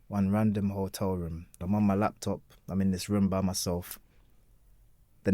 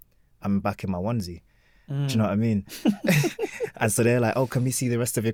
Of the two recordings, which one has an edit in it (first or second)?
first